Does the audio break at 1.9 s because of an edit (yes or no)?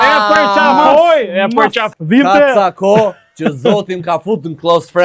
yes